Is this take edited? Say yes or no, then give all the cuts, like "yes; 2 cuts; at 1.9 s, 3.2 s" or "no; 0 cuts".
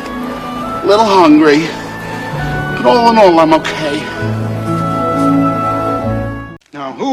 no; 0 cuts